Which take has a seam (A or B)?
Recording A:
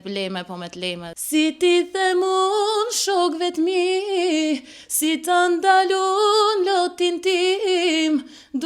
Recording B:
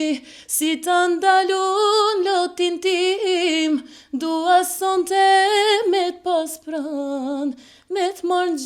A